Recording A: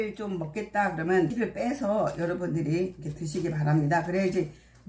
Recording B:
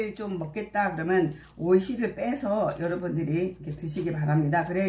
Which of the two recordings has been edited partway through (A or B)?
A